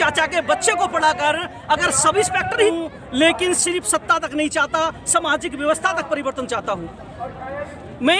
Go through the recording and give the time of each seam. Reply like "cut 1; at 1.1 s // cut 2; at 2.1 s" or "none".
cut 1; at 2.7 s